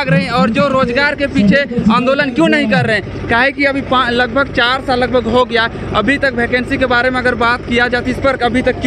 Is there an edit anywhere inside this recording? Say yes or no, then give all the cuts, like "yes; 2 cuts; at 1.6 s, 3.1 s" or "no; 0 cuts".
no; 0 cuts